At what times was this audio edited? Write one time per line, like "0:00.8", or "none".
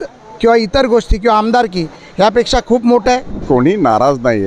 0:03.4